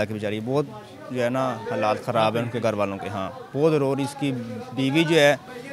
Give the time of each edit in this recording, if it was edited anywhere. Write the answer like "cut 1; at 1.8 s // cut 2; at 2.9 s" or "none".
none